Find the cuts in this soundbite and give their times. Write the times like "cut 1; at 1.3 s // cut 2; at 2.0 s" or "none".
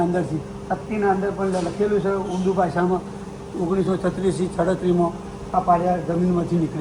none